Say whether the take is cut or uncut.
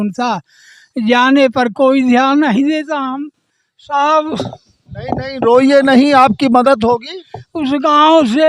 uncut